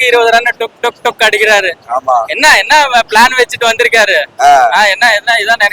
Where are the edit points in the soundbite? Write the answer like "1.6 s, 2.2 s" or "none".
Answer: none

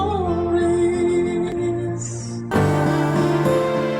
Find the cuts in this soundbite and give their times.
2.3 s

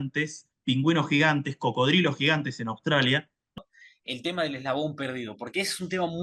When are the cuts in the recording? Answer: 3.6 s

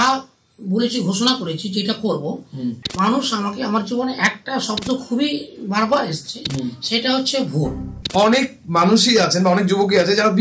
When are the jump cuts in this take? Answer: 2.8 s, 8.0 s

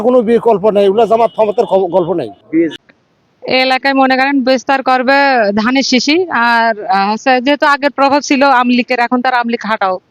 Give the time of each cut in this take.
2.7 s

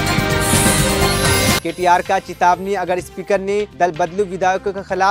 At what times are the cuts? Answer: 1.6 s

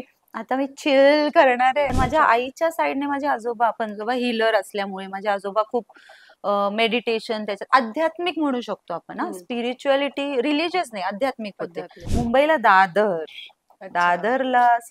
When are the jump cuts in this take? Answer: 1.9 s, 12.0 s

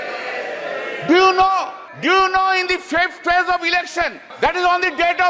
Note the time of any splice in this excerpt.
1.8 s, 4.2 s

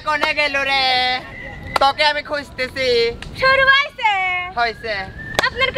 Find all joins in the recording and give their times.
none

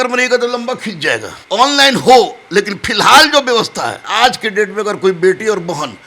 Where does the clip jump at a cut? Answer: 1.3 s, 4.0 s

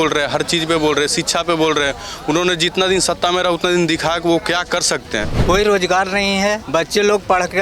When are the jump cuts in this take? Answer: 5.3 s, 6.6 s

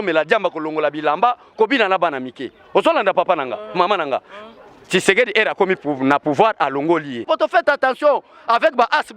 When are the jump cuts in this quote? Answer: 7.2 s

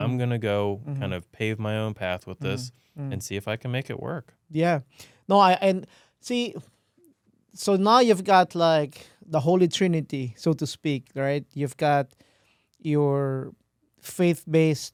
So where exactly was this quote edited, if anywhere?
none

